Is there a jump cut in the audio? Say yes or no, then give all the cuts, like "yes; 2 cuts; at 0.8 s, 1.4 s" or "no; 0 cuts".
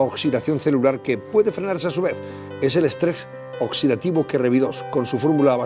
yes; 1 cut; at 1.5 s